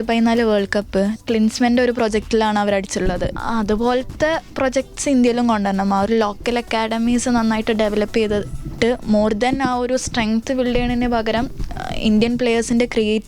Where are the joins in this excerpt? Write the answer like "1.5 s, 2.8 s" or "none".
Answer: 1.2 s, 3.3 s